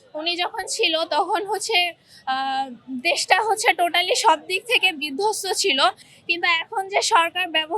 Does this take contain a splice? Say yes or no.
no